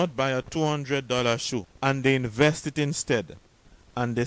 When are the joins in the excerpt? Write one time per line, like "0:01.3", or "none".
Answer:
0:01.7